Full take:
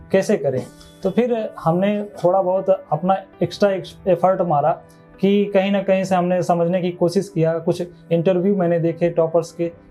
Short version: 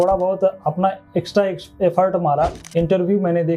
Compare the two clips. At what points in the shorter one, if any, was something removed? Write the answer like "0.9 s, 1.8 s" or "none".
2.6 s

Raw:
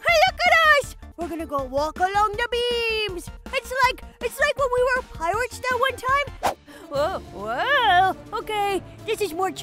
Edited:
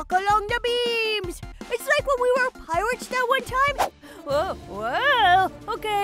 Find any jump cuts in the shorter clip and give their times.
1.5 s, 3.7 s

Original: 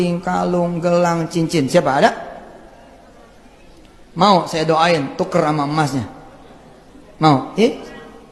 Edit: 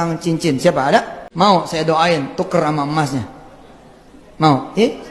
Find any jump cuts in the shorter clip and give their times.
1.2 s

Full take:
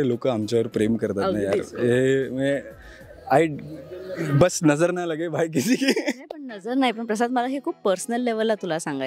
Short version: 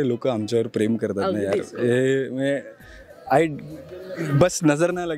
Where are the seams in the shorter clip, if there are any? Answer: none

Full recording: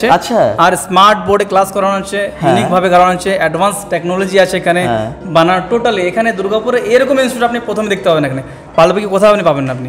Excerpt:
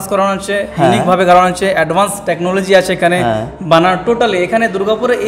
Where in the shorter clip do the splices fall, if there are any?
none

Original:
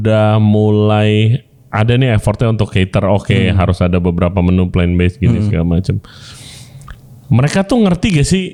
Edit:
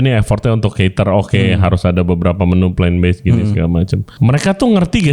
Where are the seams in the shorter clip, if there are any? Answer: 4.1 s

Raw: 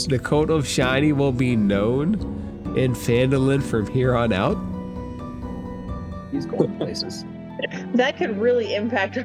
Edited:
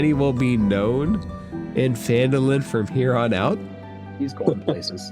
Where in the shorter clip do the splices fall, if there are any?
3.7 s

